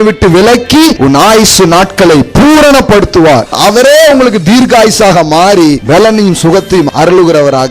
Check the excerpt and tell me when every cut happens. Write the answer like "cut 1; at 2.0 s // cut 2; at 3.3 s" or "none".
cut 1; at 1.0 s // cut 2; at 3.5 s // cut 3; at 5.8 s // cut 4; at 6.9 s